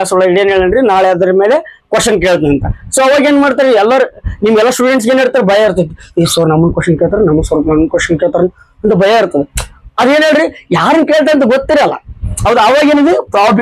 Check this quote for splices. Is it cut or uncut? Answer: uncut